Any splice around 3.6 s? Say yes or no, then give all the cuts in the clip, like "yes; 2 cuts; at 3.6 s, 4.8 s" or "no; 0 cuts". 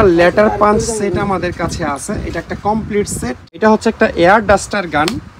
yes; 1 cut; at 3.6 s